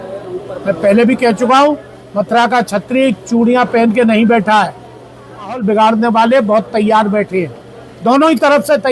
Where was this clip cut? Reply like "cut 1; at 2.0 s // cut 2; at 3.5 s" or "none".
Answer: cut 1; at 5.6 s